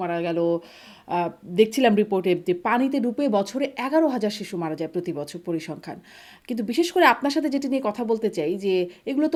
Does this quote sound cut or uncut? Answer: uncut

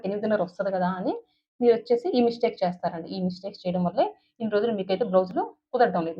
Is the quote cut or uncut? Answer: uncut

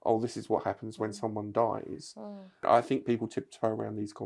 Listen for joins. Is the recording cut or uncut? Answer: cut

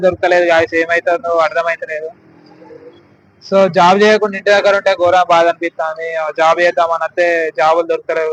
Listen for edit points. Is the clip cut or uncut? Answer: uncut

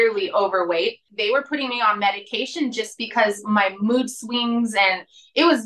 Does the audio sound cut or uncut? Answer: cut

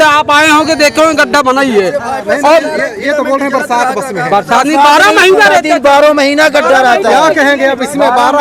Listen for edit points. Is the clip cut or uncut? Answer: uncut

